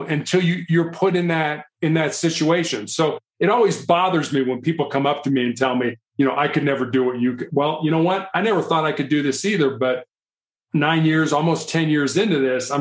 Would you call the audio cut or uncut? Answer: uncut